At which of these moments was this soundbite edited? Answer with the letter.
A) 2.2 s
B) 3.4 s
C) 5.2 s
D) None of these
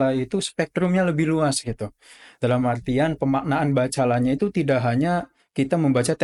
D